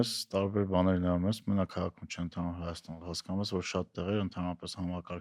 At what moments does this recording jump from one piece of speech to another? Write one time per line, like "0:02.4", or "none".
none